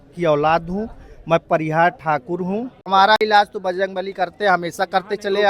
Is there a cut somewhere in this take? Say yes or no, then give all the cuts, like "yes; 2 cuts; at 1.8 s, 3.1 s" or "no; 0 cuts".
yes; 1 cut; at 2.9 s